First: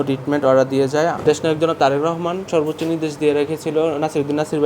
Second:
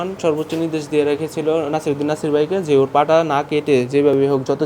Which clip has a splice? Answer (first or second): first